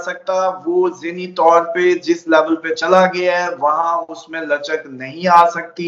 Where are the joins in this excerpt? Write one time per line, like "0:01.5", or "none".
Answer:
none